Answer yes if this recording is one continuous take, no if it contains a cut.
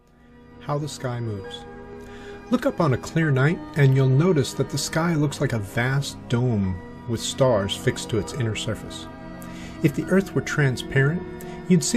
no